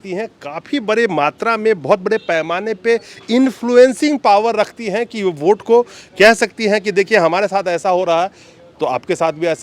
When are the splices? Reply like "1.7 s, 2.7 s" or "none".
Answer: none